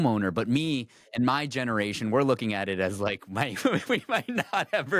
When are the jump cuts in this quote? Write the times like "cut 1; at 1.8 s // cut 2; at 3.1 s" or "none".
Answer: none